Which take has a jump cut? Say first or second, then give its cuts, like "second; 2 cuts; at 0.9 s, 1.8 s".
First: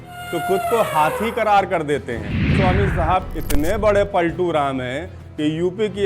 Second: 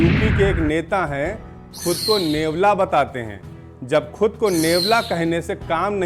first; 1 cut; at 2.5 s